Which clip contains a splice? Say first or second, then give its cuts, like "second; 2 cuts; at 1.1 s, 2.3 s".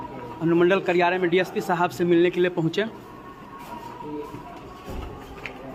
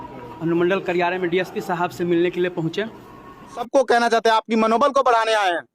second; 1 cut; at 3.7 s